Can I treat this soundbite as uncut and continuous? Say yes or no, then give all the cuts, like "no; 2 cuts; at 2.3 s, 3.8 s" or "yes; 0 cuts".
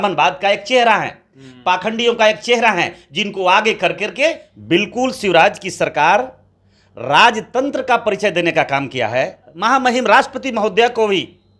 no; 2 cuts; at 4.5 s, 9.4 s